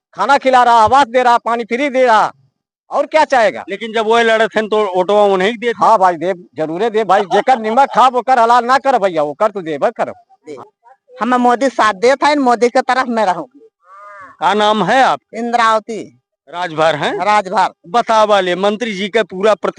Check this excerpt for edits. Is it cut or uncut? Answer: cut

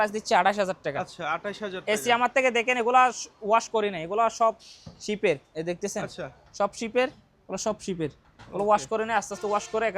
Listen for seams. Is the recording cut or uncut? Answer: uncut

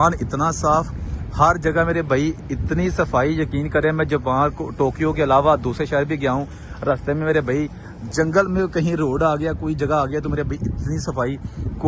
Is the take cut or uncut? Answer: uncut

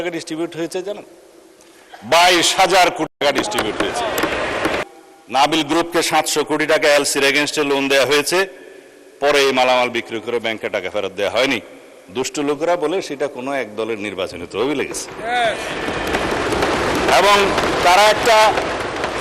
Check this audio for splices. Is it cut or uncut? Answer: cut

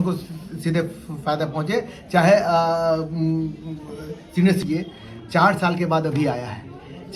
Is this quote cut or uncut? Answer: cut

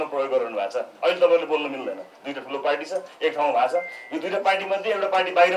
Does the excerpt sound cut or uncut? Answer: uncut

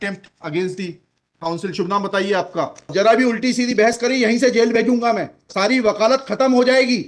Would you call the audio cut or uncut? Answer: cut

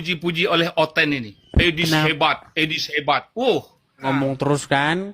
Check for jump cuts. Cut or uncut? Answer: cut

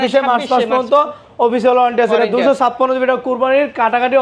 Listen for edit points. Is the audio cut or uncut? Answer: uncut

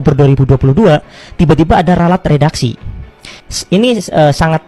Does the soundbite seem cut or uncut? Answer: uncut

